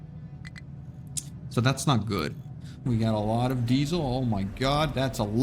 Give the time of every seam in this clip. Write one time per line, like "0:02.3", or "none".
0:02.9